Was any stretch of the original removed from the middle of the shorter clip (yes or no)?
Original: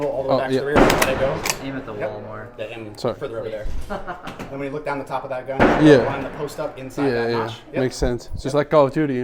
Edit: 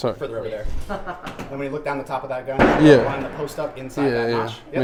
no